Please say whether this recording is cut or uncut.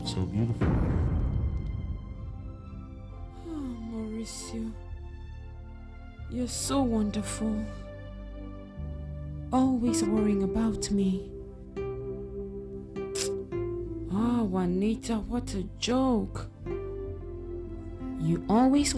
cut